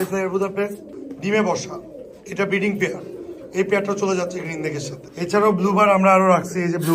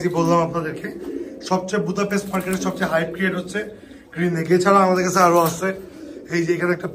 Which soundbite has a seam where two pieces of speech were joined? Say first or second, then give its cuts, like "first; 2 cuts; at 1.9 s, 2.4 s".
first; 1 cut; at 5.0 s